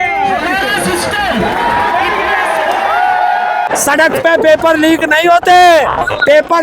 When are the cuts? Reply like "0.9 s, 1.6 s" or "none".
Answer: 3.7 s